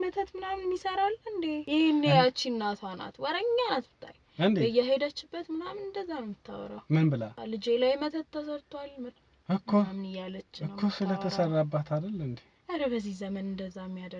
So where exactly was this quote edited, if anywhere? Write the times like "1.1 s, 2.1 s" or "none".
1.6 s, 7.4 s